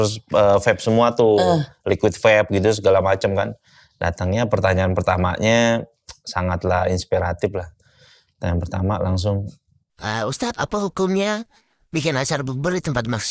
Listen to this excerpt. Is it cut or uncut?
uncut